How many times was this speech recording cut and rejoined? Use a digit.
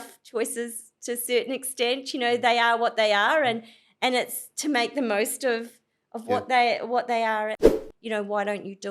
1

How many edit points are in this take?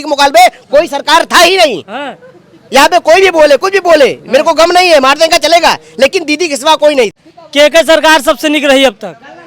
1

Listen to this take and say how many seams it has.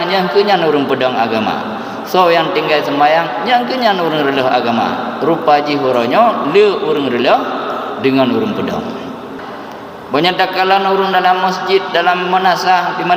1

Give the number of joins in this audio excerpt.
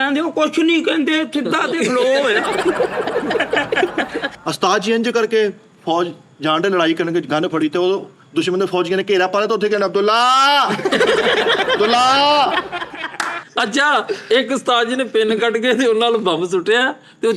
2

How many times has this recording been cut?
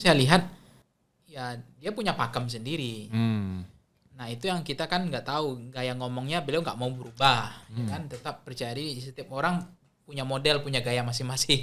0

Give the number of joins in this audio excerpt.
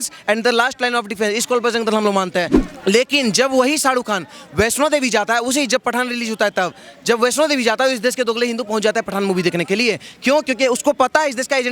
1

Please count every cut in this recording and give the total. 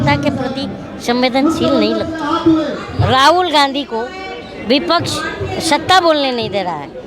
1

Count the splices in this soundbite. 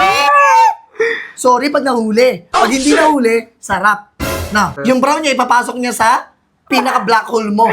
1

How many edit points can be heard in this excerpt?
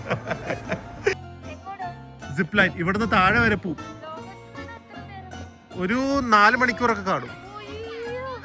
1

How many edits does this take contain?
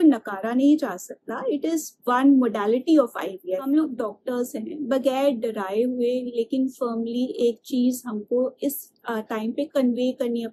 1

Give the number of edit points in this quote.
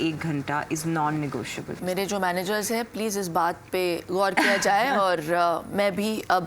1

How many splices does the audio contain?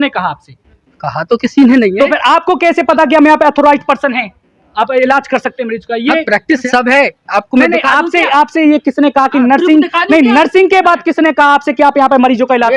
1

